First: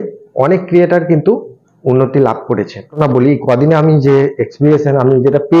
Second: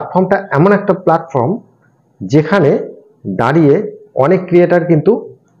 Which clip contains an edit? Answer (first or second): first